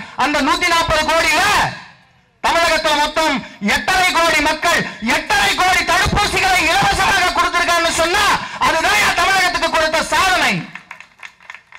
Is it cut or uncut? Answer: uncut